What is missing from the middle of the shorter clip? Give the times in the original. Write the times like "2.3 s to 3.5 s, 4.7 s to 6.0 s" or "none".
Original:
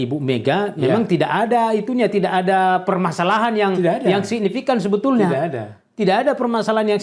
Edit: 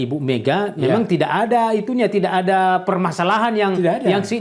none